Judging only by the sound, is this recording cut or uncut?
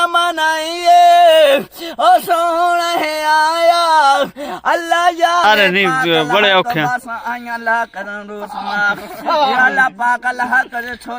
cut